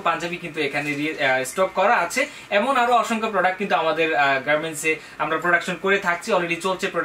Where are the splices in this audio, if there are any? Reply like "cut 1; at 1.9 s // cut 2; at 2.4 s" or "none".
none